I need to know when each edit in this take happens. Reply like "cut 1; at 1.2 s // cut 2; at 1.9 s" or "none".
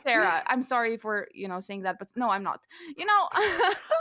none